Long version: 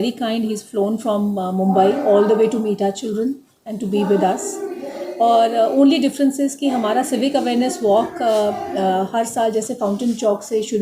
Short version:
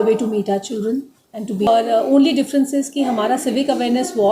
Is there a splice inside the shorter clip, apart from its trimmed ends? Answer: yes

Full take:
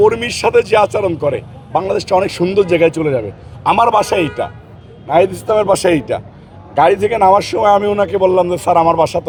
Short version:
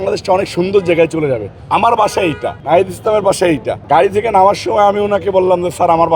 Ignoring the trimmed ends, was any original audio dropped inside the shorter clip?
yes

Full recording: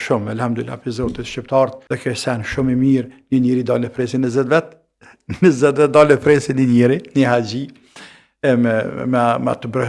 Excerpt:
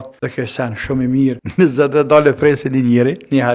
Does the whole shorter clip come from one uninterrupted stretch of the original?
no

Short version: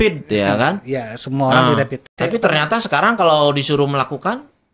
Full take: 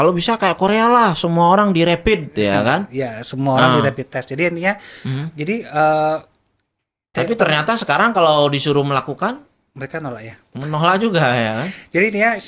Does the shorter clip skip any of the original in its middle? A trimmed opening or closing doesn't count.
yes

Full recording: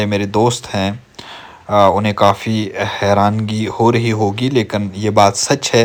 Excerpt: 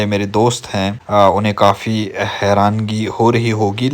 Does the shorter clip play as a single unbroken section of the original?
no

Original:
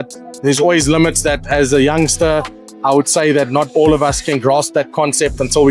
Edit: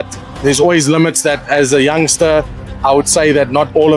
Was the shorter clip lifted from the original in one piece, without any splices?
yes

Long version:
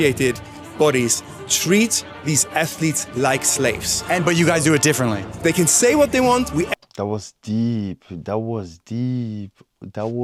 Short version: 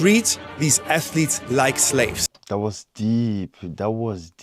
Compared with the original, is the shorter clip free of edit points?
no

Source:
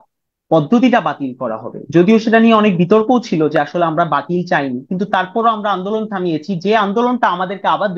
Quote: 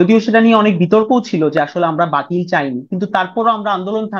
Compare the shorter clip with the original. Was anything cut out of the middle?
no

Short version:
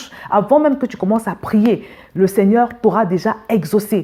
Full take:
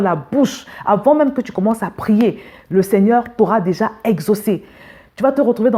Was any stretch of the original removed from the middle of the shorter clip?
no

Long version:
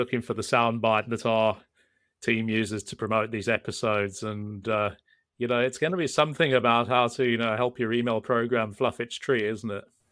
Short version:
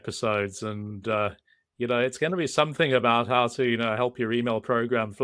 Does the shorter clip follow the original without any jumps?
yes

